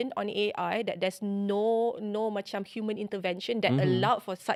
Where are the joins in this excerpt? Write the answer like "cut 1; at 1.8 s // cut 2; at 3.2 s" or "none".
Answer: none